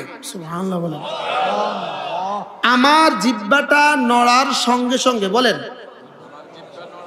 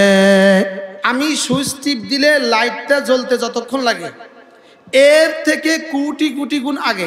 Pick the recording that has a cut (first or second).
second